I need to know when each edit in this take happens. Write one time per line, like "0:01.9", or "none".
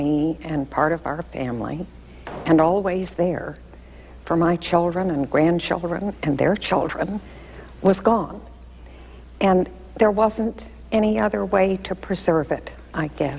none